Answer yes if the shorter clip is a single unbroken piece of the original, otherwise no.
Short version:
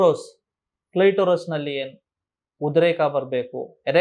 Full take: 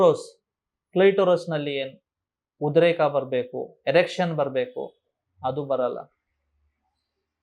yes